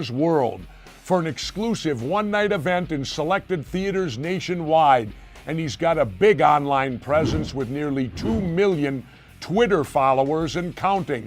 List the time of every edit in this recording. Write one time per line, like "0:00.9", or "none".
none